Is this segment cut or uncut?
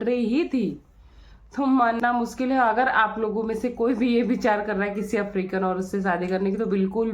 cut